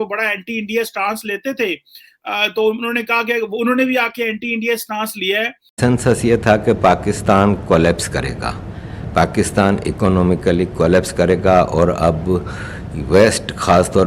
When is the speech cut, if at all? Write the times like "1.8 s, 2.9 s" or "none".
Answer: 5.8 s